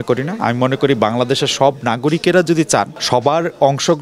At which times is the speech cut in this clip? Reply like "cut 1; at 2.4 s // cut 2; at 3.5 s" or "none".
cut 1; at 3.0 s